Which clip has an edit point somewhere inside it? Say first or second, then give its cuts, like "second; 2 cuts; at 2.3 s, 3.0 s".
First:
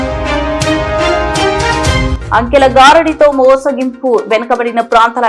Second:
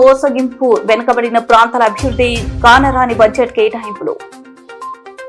first; 1 cut; at 1.9 s